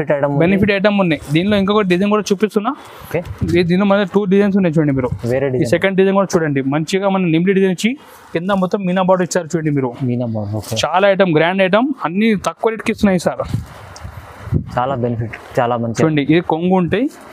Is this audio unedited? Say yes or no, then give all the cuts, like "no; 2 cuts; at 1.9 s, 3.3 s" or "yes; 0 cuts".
yes; 0 cuts